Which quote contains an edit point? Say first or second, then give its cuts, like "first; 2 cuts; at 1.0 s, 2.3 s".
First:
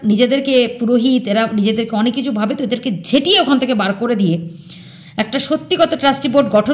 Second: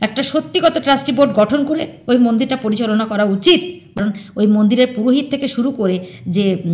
second; 1 cut; at 3.9 s